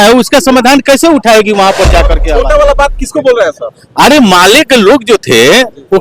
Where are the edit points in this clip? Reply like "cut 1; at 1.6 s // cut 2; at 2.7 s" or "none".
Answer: cut 1; at 2.2 s